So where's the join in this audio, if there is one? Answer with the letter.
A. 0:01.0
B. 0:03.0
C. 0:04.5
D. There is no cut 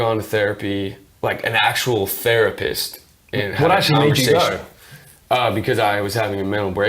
A